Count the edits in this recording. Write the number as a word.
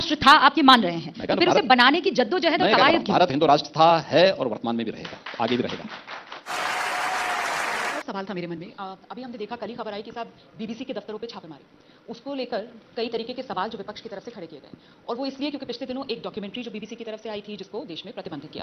zero